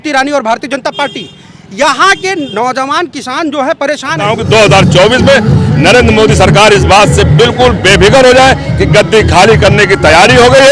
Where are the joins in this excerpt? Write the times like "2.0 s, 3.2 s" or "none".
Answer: 4.4 s